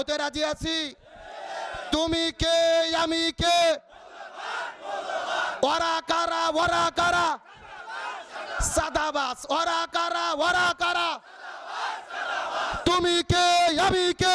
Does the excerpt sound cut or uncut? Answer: uncut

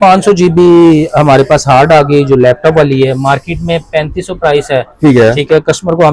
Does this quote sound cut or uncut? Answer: uncut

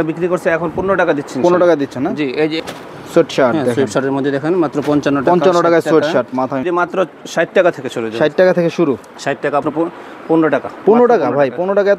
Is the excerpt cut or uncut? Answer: cut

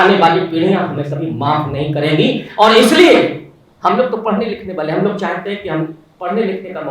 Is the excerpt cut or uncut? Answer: uncut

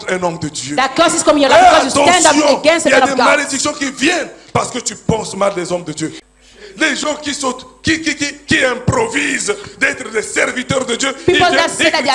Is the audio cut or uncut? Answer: cut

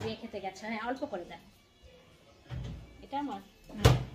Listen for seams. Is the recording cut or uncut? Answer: uncut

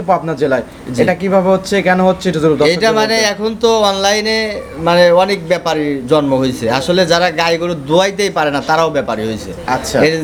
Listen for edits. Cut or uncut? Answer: uncut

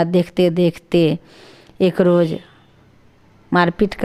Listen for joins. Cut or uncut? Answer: uncut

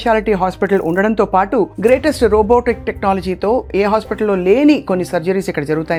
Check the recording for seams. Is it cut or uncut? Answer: uncut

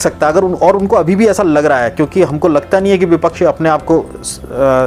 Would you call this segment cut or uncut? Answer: uncut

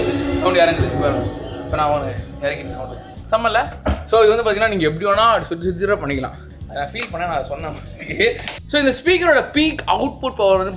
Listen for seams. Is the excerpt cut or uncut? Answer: uncut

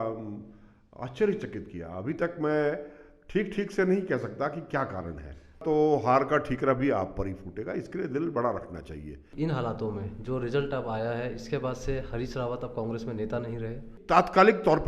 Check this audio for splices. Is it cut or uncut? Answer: cut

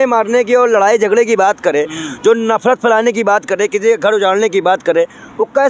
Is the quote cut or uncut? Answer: uncut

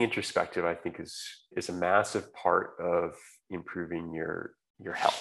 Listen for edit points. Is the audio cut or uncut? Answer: cut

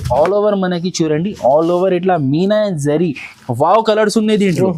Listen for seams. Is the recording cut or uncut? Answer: cut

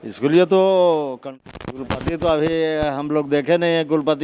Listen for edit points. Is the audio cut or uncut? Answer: cut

